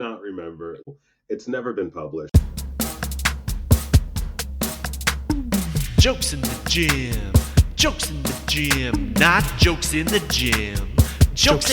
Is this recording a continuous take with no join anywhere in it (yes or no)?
no